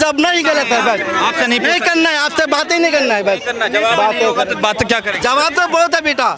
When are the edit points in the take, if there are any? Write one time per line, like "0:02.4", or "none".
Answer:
none